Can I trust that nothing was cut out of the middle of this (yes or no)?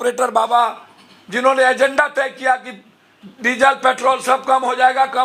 yes